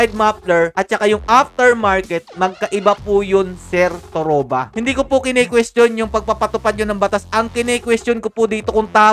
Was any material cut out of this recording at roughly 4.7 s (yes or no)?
yes